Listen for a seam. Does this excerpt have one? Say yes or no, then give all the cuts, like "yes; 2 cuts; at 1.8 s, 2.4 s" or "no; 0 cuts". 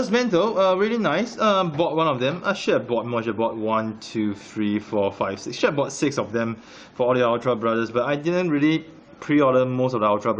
no; 0 cuts